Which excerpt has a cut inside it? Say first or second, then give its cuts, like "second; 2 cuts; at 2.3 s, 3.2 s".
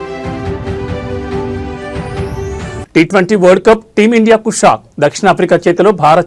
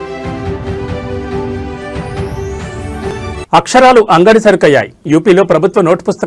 first; 1 cut; at 2.8 s